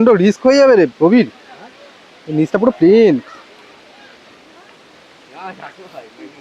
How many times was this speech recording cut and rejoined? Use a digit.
1